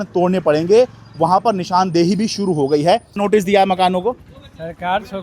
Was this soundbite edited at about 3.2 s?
yes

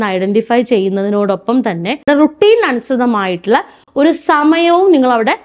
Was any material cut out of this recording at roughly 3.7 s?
no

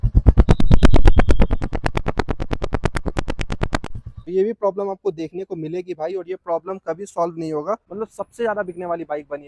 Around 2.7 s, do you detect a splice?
no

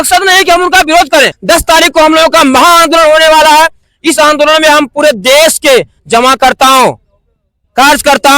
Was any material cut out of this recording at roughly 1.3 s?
yes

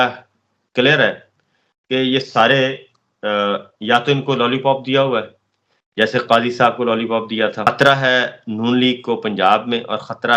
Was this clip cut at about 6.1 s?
no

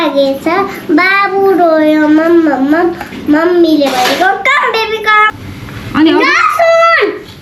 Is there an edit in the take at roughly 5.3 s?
yes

